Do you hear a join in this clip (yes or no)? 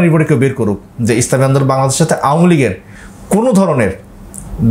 no